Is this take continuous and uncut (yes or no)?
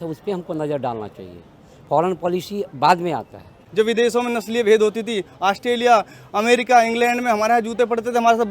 no